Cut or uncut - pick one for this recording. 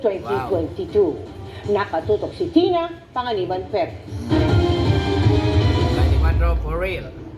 cut